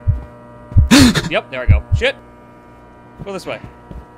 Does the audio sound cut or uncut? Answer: cut